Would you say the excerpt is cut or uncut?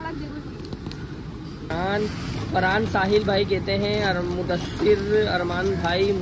cut